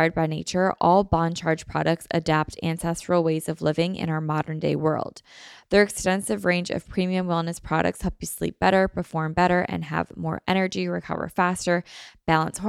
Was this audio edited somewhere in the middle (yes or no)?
no